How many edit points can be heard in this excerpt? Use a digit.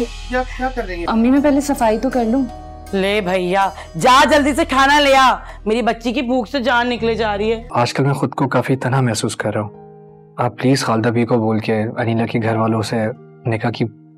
2